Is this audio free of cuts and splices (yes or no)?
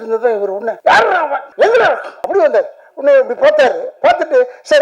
no